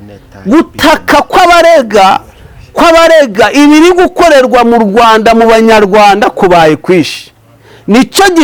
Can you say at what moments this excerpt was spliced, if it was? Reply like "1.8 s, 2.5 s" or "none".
none